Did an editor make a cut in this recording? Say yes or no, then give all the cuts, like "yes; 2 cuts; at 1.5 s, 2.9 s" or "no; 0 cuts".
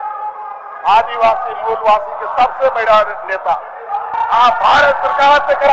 yes; 1 cut; at 4.1 s